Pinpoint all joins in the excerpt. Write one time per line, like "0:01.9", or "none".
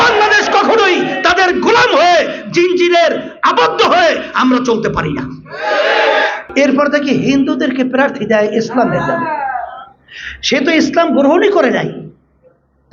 0:06.4